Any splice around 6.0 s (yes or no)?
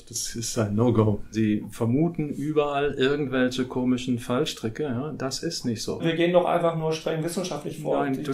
yes